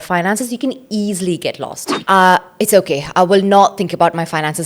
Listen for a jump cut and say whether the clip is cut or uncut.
cut